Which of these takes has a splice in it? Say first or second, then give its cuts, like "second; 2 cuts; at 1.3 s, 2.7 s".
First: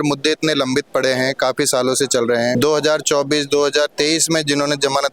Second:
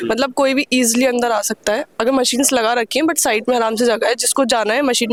first; 1 cut; at 2.5 s